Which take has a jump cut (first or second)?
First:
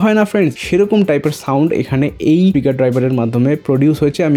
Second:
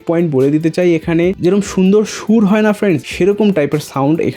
second